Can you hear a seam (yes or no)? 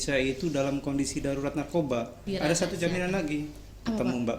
yes